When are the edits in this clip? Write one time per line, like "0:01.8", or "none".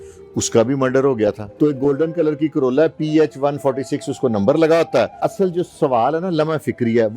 0:01.4
0:05.2